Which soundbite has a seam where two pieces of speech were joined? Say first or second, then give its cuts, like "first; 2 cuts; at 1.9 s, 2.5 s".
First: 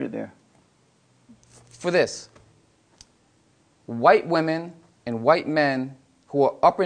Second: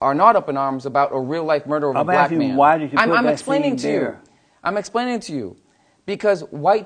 first; 1 cut; at 1.2 s